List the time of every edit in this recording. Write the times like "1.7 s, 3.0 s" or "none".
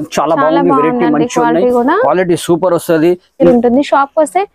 3.5 s